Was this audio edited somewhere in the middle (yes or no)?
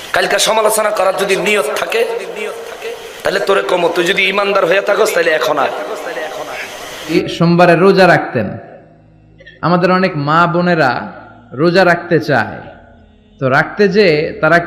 yes